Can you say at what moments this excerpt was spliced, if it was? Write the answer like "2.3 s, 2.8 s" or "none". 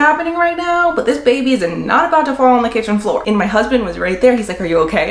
3.2 s